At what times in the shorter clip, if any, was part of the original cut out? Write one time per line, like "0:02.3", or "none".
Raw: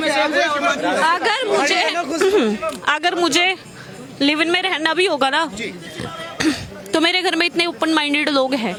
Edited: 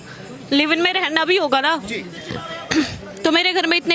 none